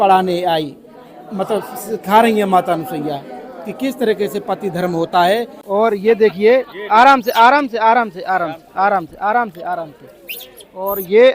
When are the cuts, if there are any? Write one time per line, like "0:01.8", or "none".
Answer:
0:05.6